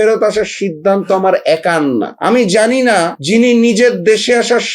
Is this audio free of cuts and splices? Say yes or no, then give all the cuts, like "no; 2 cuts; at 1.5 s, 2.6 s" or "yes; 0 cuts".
no; 2 cuts; at 2.1 s, 3.2 s